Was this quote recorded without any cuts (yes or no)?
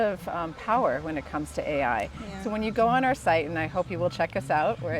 yes